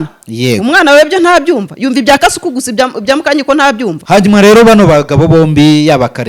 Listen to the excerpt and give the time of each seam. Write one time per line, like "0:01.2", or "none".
0:04.0